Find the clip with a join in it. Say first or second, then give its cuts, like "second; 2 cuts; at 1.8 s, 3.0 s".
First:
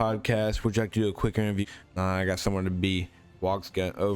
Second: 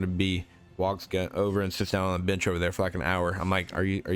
first; 1 cut; at 1.6 s